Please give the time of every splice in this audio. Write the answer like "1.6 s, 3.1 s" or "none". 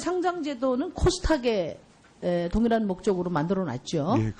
1.4 s